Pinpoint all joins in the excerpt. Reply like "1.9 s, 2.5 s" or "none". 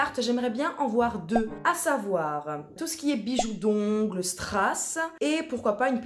1.5 s, 5.0 s